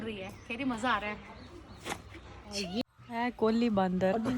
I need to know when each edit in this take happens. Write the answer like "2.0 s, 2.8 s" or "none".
2.8 s